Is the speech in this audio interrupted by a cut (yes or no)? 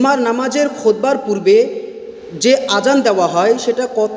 no